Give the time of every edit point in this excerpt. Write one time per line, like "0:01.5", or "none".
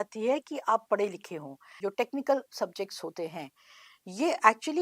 0:01.6